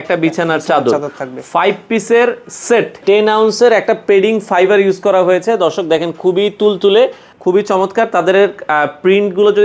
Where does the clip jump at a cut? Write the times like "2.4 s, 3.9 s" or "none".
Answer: 3.0 s, 7.3 s